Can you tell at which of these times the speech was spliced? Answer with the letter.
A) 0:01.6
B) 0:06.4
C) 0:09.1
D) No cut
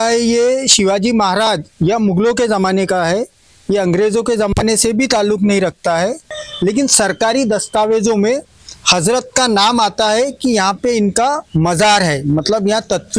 B